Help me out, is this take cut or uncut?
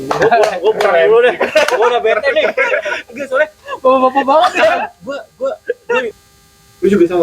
cut